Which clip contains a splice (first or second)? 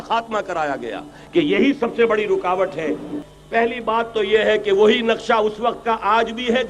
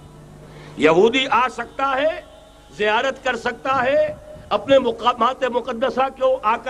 first